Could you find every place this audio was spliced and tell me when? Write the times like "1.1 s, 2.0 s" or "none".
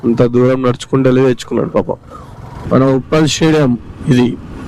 2.7 s